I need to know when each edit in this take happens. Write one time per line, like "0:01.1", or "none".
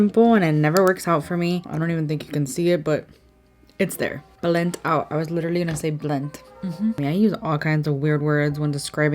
0:01.6
0:04.2
0:07.0